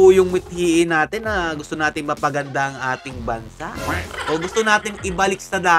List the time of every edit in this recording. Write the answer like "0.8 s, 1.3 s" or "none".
none